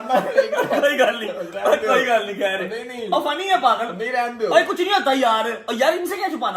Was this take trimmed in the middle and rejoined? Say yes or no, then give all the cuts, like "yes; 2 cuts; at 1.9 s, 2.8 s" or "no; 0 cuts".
no; 0 cuts